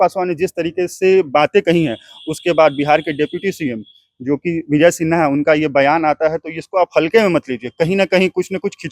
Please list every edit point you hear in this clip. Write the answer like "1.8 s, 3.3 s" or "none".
none